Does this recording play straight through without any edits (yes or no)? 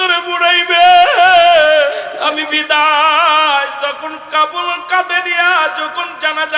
no